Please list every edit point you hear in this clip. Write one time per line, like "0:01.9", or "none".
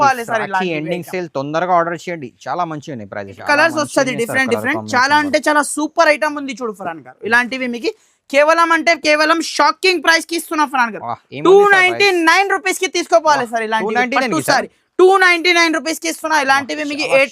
0:03.4